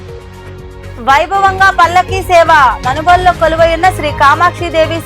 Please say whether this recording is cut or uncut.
cut